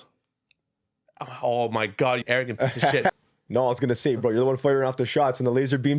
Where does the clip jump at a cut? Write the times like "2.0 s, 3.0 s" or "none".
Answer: 2.2 s, 3.1 s

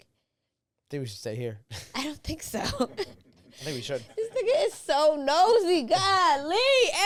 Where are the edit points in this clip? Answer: none

